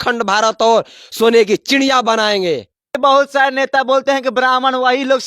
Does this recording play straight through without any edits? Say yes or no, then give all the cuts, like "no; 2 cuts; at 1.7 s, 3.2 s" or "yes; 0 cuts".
no; 1 cut; at 3.0 s